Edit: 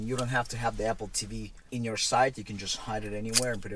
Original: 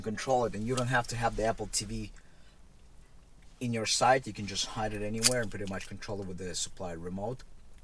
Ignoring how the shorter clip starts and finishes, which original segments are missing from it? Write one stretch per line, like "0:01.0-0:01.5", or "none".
0:02.1-0:03.4